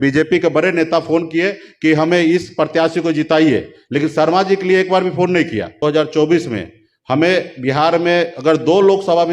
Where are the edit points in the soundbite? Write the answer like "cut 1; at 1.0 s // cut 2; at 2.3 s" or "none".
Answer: cut 1; at 5.8 s